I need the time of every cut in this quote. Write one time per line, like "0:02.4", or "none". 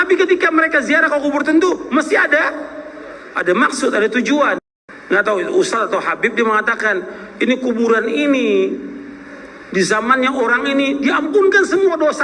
0:04.7